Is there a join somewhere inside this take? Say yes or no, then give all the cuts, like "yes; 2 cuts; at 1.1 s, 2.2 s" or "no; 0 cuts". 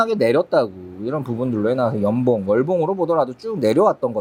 no; 0 cuts